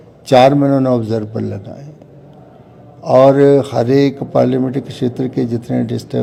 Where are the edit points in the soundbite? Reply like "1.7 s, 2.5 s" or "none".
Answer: none